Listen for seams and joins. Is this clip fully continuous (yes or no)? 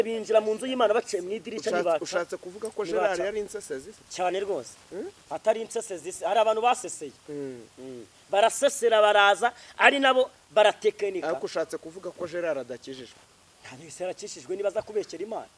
yes